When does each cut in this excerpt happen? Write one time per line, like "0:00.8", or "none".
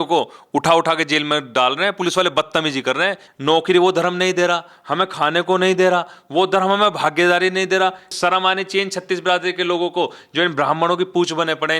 0:03.2
0:08.1